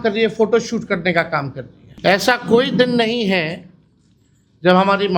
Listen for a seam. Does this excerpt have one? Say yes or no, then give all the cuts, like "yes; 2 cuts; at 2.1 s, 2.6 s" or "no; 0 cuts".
yes; 1 cut; at 1.8 s